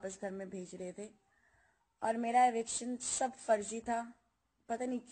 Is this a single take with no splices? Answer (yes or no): yes